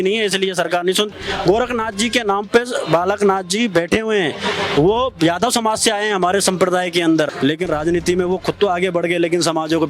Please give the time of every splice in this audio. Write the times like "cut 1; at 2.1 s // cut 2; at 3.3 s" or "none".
cut 1; at 1.2 s // cut 2; at 7.3 s